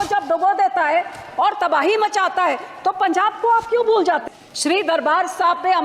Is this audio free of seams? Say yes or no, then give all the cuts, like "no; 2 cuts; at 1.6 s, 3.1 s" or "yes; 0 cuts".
no; 1 cut; at 4.2 s